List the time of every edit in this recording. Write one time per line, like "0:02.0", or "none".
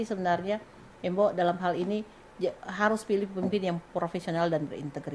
none